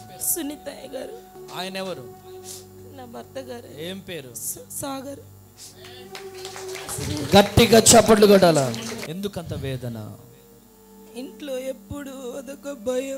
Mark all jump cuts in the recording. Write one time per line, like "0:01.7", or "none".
0:01.3
0:09.0

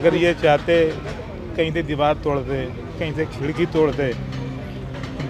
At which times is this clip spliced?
none

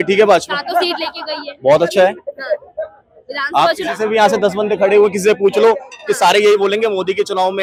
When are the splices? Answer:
none

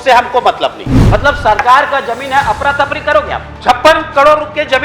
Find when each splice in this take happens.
0:00.9
0:03.5

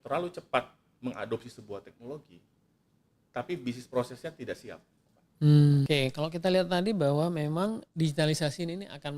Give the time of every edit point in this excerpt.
0:05.9

